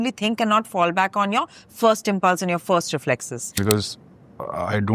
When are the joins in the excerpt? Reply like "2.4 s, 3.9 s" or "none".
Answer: 3.5 s